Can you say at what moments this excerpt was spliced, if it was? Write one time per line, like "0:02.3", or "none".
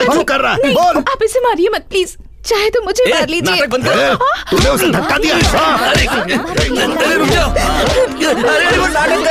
none